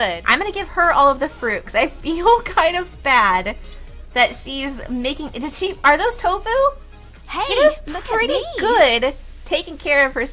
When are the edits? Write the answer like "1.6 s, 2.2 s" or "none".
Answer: none